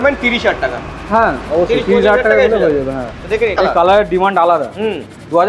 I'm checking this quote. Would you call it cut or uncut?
cut